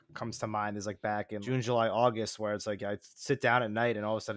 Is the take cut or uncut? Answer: cut